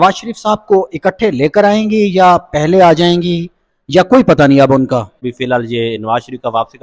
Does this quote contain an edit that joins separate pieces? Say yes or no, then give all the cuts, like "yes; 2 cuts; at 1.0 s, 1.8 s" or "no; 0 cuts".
yes; 1 cut; at 5.3 s